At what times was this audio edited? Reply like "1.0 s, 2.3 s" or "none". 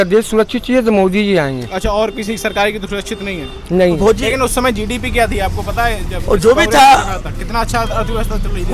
4.0 s